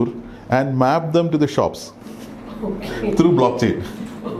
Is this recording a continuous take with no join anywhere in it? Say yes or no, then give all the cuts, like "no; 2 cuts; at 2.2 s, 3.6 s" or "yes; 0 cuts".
yes; 0 cuts